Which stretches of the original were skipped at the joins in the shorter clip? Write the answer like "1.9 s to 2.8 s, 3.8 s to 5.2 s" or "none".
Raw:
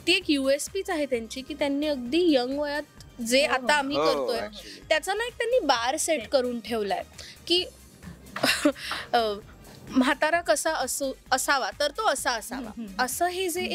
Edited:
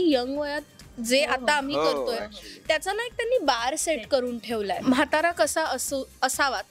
7.0 s to 9.9 s